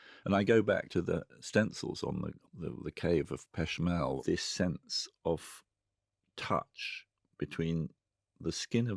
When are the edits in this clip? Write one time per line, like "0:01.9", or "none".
0:00.9
0:02.3
0:04.2